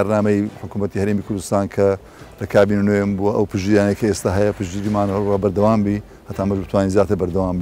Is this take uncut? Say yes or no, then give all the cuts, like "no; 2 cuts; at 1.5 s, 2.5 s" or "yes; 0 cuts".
yes; 0 cuts